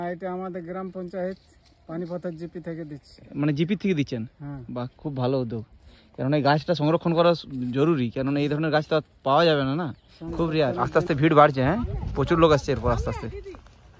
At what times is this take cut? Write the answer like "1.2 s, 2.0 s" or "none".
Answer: 10.8 s